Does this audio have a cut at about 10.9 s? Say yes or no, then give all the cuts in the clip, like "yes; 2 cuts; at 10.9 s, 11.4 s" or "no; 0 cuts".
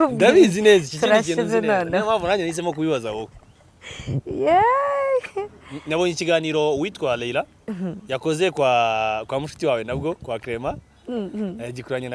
no; 0 cuts